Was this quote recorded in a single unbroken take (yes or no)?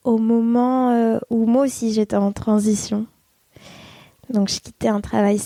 yes